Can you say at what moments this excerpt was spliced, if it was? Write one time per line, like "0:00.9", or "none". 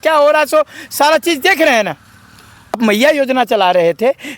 0:02.8